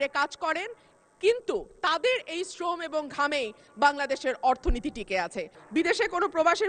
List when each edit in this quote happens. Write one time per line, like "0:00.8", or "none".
0:05.6